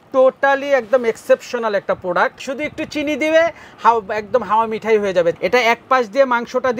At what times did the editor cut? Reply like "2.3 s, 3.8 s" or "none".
2.4 s, 5.4 s